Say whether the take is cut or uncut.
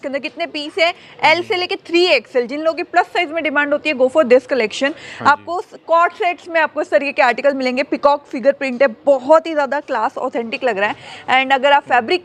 uncut